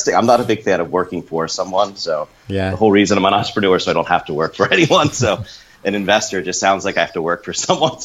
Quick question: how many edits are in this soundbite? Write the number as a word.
zero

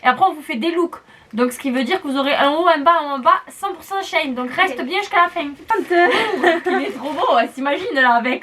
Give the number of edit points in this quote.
one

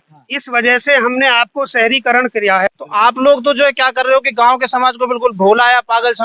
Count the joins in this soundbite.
one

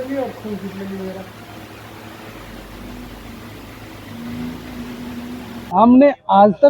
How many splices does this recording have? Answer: one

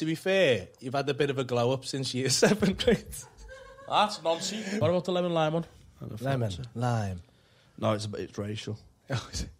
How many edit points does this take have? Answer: one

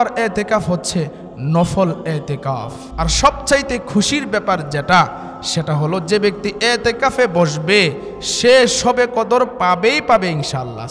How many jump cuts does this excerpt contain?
one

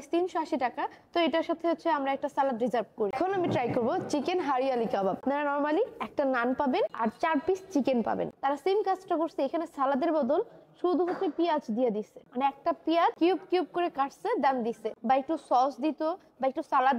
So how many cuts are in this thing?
zero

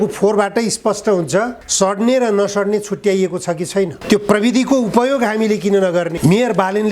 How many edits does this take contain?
two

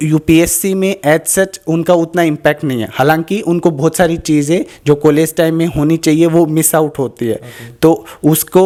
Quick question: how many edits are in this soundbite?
zero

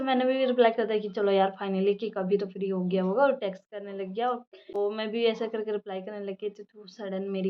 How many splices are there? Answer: zero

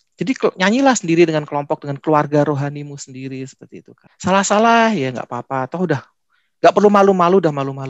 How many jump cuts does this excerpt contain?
one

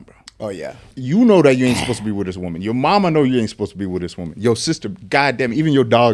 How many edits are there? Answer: one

